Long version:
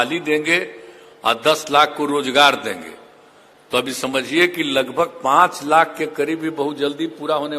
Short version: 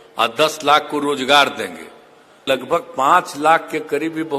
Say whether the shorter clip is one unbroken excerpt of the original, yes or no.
no